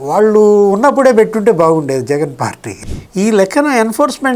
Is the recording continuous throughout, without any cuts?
no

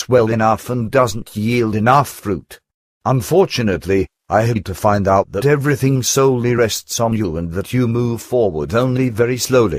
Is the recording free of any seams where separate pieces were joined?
yes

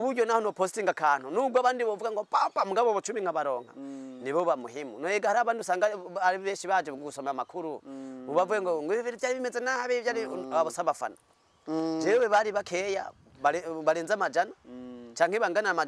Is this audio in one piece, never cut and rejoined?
yes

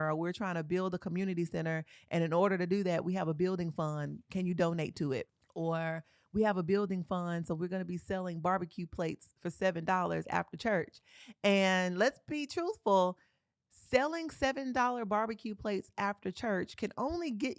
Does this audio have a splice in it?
yes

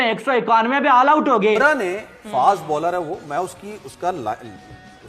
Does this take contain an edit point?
yes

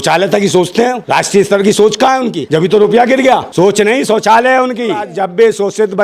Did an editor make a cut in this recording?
yes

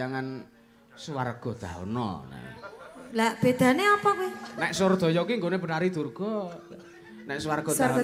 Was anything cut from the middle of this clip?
no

